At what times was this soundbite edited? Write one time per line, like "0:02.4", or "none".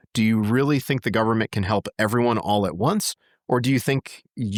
none